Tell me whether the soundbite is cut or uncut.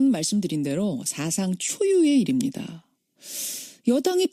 uncut